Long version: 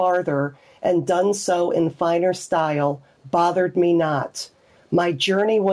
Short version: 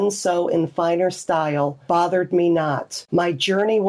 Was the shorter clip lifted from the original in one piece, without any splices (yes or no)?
no